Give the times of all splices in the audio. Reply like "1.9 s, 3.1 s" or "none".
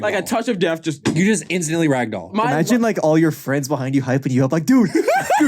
2.3 s